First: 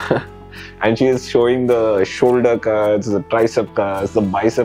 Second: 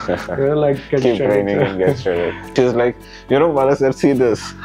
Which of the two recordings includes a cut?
second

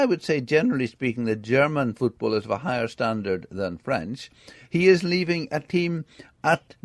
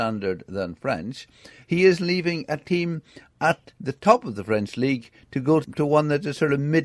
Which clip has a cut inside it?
second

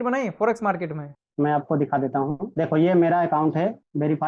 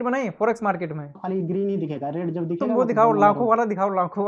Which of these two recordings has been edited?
second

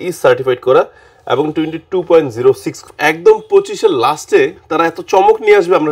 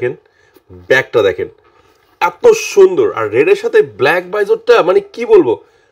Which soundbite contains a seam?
first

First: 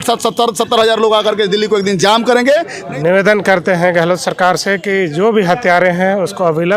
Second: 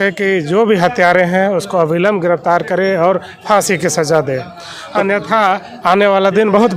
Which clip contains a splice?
first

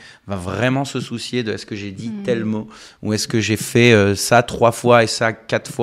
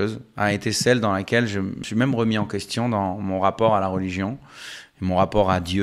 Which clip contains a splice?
second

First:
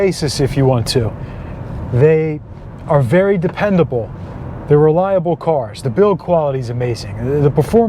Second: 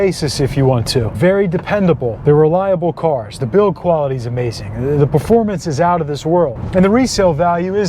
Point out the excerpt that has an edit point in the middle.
second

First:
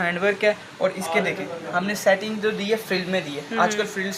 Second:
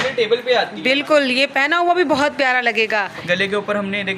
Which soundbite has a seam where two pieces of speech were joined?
second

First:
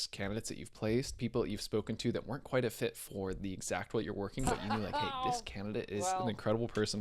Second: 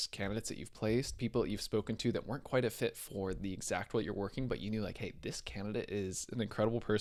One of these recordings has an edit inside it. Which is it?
first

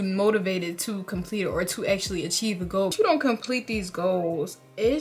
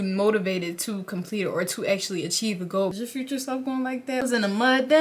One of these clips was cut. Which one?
second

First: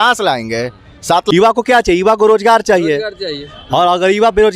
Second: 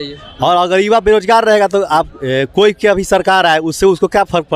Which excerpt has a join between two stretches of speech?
first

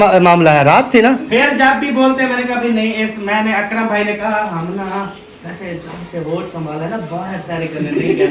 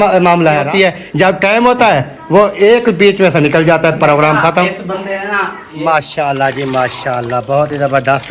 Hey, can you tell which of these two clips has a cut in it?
second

